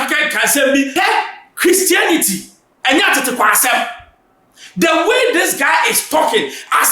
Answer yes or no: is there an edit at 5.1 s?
no